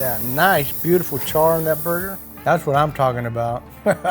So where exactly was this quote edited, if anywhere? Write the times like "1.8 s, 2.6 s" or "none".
2.1 s